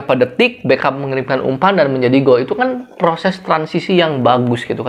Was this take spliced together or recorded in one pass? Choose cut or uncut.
uncut